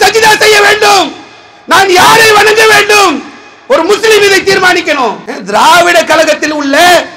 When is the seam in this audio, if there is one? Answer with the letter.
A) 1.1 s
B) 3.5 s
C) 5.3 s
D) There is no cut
C